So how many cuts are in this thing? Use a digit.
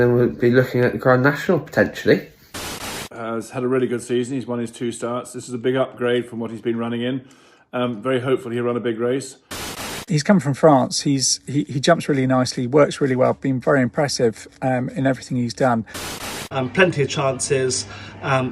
3